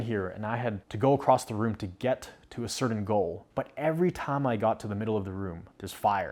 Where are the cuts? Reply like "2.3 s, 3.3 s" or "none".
none